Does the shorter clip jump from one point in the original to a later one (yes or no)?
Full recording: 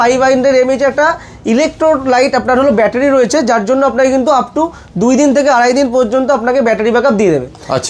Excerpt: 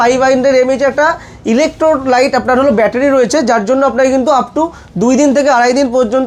no